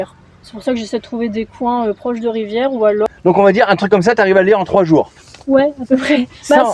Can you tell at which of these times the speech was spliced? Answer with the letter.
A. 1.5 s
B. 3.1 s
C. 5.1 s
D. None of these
B